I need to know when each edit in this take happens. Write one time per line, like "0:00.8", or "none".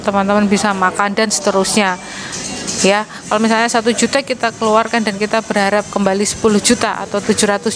none

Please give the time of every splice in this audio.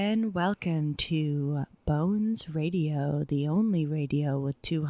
none

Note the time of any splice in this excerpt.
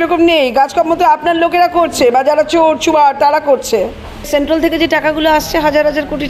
0:04.3

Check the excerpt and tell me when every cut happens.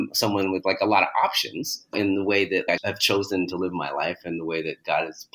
none

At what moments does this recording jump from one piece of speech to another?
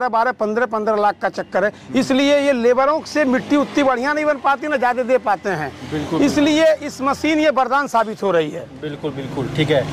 none

